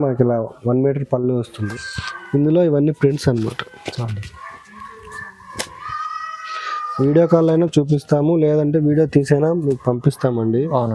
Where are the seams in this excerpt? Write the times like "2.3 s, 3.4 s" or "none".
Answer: 1.6 s

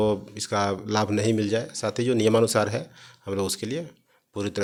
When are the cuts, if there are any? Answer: none

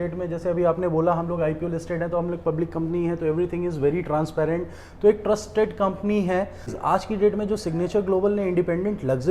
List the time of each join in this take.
6.8 s

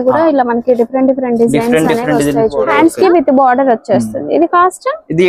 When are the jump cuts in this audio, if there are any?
2.7 s

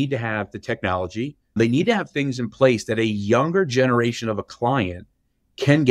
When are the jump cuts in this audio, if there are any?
1.6 s

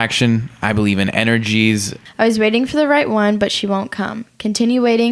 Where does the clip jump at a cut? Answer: 2.0 s

